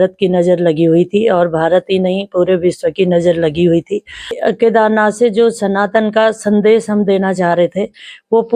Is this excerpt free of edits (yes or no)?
no